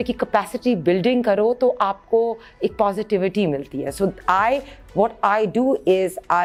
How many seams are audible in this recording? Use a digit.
0